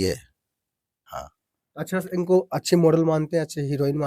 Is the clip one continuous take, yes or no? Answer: no